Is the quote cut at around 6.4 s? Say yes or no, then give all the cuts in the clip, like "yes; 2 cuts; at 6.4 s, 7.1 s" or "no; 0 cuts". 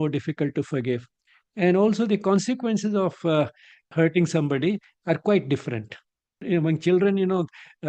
yes; 2 cuts; at 3.9 s, 6.4 s